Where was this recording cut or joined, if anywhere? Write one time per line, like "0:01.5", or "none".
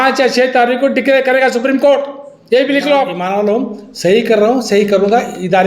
0:03.2

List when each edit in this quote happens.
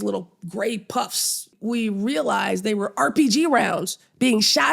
0:01.5

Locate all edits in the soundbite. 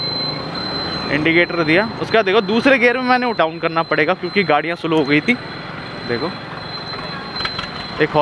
0:03.4

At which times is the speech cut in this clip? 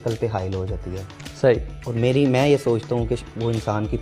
none

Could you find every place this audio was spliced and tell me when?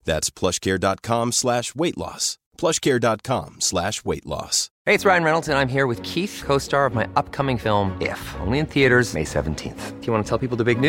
0:04.6

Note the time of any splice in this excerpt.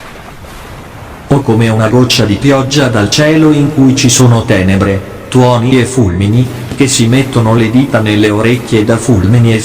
0:01.3

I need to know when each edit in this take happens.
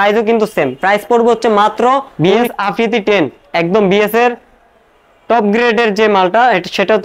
0:02.1

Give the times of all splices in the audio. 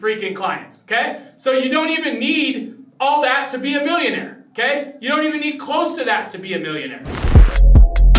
0:07.3

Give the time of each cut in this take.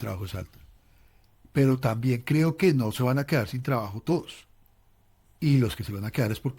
0:05.3

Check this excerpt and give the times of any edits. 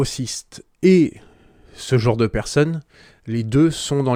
none

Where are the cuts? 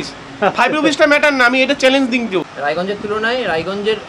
0:02.5

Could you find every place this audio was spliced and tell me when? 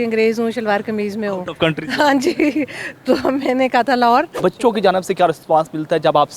0:04.4

